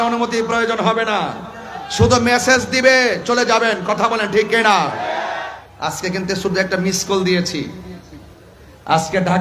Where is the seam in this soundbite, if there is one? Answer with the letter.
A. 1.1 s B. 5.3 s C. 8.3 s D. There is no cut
B